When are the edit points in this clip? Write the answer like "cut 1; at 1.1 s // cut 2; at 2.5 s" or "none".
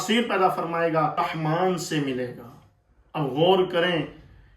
cut 1; at 1.2 s